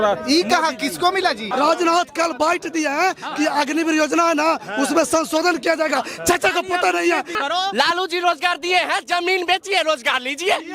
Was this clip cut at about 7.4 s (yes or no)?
yes